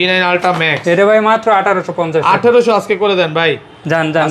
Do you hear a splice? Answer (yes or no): no